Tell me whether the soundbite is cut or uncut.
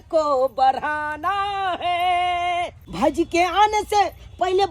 cut